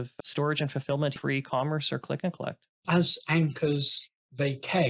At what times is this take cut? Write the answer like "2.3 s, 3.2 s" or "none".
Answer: 1.2 s, 2.8 s